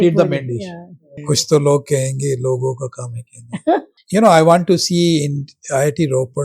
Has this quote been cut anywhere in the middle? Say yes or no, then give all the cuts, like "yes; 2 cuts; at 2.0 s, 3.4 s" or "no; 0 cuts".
yes; 2 cuts; at 1.1 s, 4.0 s